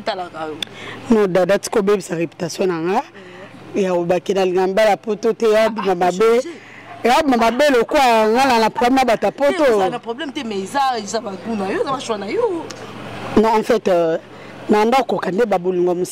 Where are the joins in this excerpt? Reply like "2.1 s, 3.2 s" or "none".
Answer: none

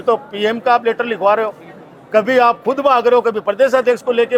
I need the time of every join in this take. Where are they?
none

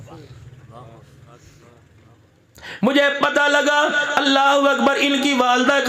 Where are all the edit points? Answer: 2.2 s

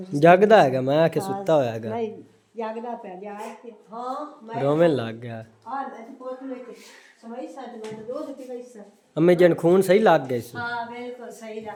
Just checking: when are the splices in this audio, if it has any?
none

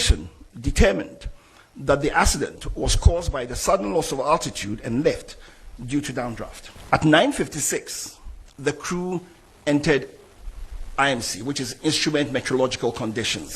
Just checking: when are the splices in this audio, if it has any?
6.7 s

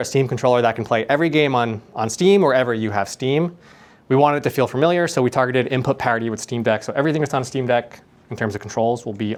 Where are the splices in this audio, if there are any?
none

